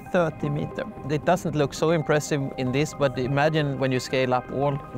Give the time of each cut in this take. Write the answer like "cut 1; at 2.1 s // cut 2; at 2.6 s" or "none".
cut 1; at 1.0 s // cut 2; at 2.5 s // cut 3; at 3.7 s